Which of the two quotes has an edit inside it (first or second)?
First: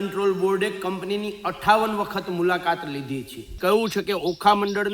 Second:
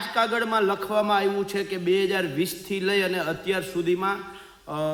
first